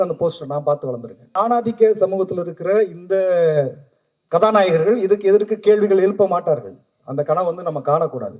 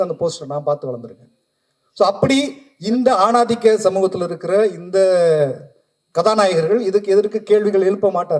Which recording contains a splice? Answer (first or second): first